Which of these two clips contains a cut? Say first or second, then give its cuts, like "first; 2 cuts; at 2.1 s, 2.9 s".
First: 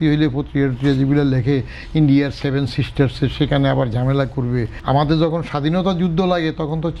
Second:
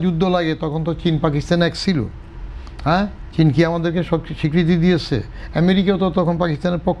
first; 1 cut; at 4.7 s